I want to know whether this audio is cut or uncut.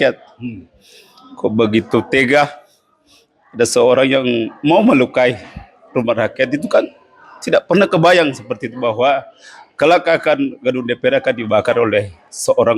uncut